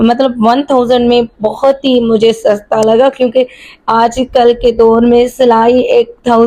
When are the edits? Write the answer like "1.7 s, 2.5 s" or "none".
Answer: none

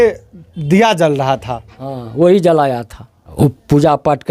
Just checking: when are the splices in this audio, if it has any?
3.2 s

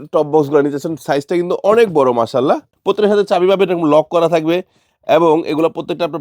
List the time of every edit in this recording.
2.7 s

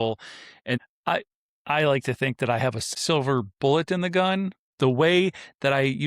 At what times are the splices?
0.8 s, 2.9 s, 4.6 s

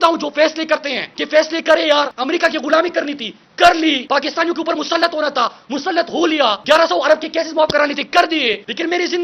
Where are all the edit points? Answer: none

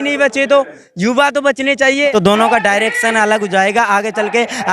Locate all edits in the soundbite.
2.1 s

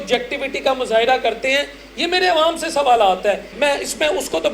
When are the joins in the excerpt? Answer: 3.5 s

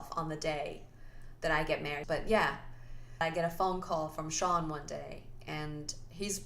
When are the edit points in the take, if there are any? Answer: 2.0 s, 3.2 s

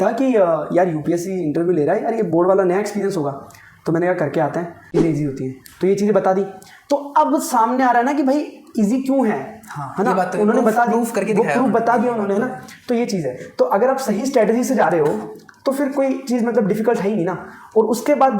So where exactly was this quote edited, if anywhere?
4.9 s

